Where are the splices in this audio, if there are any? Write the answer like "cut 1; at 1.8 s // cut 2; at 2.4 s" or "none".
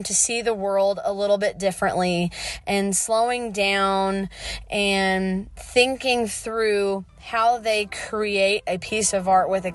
none